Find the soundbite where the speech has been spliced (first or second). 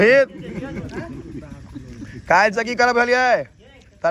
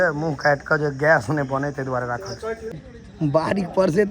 second